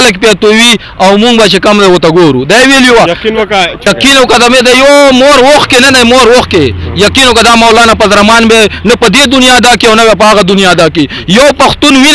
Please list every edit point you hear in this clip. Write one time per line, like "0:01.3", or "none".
none